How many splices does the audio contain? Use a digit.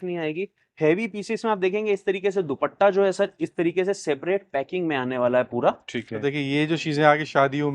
1